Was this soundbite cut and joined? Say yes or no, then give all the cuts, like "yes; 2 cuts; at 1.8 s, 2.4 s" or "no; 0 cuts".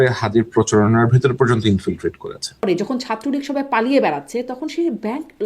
yes; 1 cut; at 2.6 s